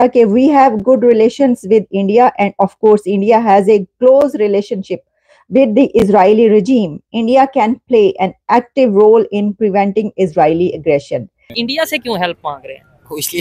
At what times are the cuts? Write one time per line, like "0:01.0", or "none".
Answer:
0:11.5